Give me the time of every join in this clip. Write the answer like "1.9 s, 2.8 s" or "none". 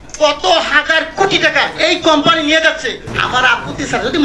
3.1 s